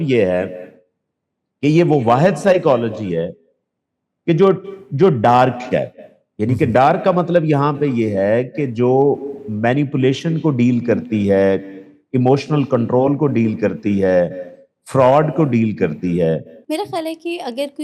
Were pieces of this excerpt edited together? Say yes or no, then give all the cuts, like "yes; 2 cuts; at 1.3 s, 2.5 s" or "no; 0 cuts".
yes; 1 cut; at 16.6 s